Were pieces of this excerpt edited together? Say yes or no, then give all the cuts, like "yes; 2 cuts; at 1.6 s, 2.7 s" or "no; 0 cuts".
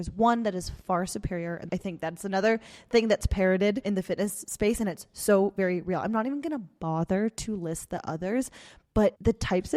yes; 1 cut; at 1.6 s